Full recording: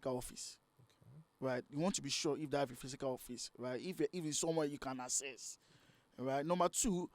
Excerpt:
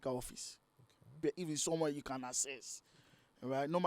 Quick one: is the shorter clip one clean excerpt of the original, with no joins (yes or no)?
no